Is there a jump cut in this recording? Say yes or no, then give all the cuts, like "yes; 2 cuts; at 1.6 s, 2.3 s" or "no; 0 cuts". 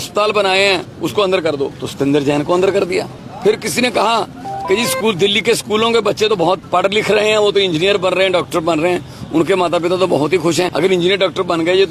yes; 5 cuts; at 0.9 s, 1.8 s, 3.2 s, 6.6 s, 10.7 s